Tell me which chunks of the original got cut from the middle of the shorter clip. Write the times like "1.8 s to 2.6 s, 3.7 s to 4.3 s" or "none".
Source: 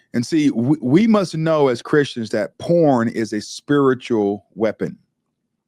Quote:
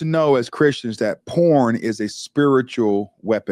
none